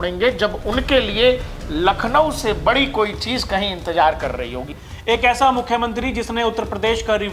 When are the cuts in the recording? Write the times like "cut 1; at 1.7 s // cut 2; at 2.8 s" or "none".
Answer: cut 1; at 4.7 s